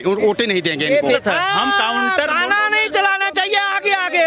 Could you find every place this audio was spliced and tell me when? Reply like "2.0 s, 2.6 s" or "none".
1.2 s

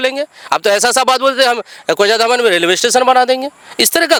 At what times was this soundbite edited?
none

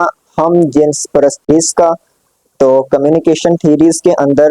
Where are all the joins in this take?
1.5 s

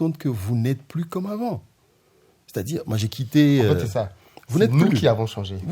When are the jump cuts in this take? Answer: none

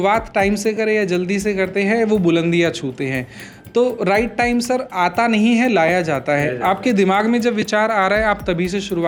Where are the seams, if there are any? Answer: none

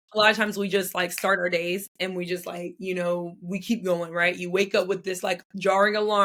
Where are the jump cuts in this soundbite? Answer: none

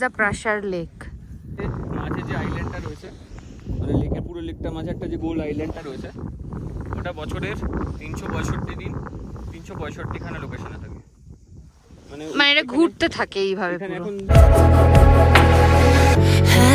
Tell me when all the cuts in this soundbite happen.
1.6 s, 14.3 s

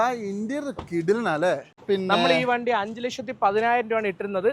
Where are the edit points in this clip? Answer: 1.7 s

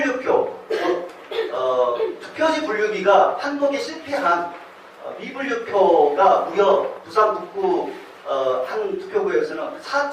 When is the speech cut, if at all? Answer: 1.5 s

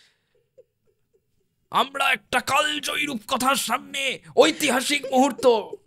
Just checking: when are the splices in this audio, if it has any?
none

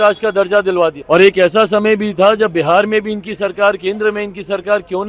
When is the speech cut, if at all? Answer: 1.0 s

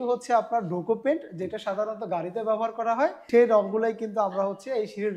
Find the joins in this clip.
3.2 s

